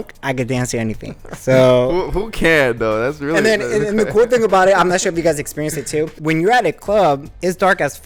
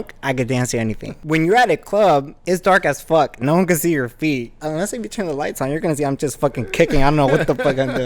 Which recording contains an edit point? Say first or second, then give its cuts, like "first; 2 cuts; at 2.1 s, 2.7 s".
second; 2 cuts; at 1.2 s, 4.6 s